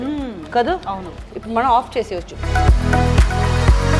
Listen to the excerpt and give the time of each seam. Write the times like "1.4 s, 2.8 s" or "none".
2.4 s